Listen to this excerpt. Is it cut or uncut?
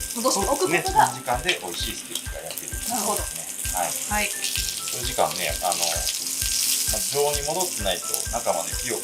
uncut